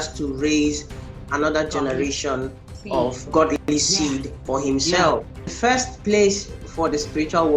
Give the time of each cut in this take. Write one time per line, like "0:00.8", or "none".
0:03.2
0:05.4